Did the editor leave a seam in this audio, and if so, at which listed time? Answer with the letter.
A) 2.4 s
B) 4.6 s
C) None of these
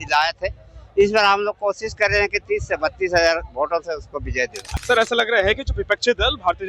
B